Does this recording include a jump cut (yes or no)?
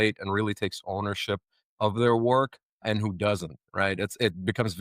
yes